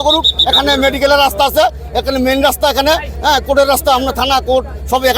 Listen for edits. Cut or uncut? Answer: uncut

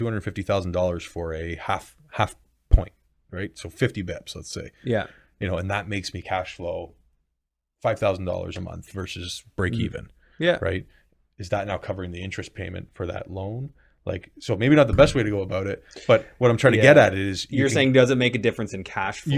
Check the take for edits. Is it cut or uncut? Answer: uncut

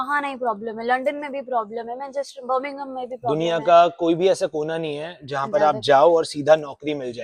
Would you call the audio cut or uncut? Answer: uncut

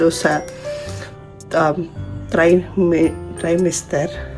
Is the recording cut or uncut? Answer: uncut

